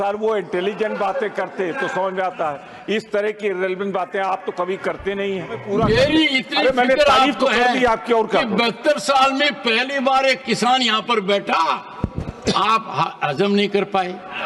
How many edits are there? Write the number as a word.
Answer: one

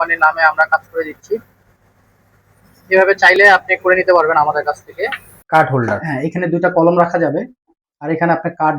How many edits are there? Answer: one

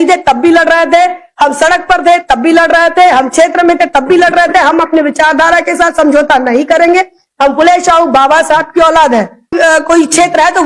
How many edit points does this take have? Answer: one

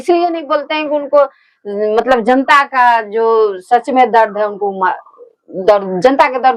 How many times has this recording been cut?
zero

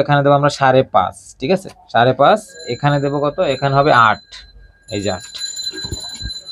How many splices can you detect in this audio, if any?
zero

